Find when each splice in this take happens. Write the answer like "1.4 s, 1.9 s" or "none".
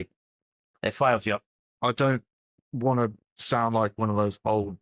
1.4 s